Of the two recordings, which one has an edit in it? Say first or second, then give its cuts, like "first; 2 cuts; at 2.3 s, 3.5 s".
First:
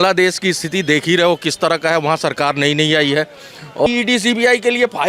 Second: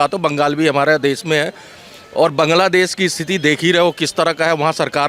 first; 1 cut; at 3.9 s